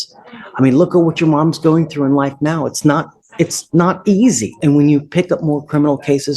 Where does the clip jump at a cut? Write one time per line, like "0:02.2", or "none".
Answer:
0:04.5